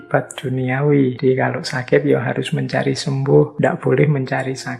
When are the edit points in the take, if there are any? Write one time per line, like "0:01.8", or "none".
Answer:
0:01.2
0:03.5

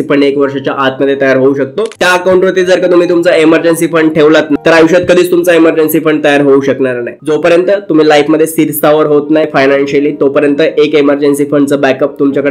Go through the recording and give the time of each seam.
0:02.0
0:04.6
0:07.1
0:09.5

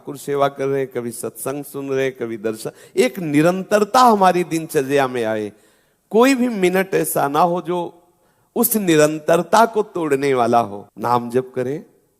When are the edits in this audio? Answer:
0:10.8

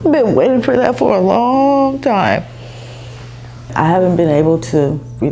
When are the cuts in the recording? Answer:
0:03.7

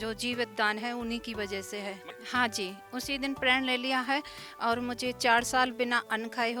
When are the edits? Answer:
0:02.1

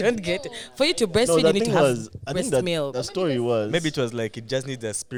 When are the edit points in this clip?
none

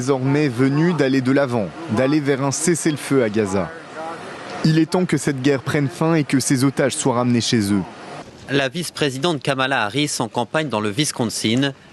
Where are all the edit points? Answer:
0:05.1
0:08.9

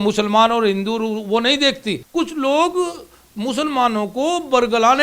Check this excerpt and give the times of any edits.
0:02.0

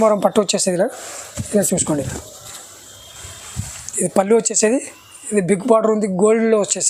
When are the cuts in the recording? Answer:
none

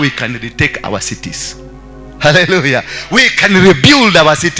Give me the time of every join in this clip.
none

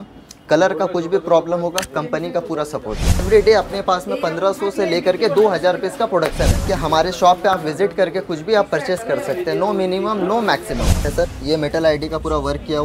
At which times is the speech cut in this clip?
0:03.2
0:06.6
0:11.0

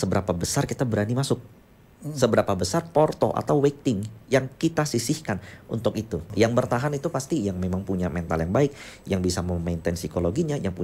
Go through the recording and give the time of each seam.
0:06.3

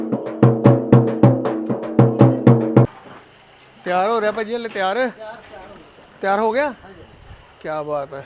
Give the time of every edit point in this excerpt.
none

